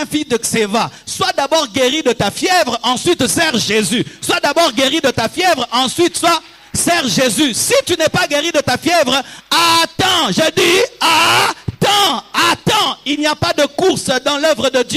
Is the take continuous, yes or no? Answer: yes